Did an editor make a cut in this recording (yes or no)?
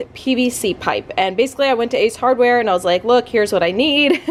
no